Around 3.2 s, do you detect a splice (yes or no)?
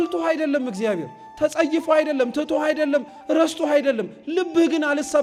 no